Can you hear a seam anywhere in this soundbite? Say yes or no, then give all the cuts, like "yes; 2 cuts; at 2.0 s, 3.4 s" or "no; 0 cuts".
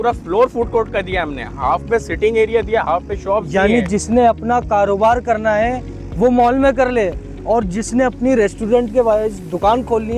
no; 0 cuts